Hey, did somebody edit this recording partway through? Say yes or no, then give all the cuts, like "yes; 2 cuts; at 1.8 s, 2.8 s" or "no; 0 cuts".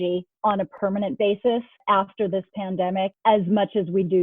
yes; 1 cut; at 3.2 s